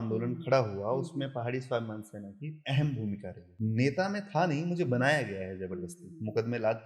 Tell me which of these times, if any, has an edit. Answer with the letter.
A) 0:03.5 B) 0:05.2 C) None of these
A